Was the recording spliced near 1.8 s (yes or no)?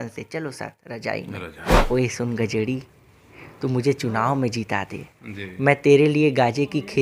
yes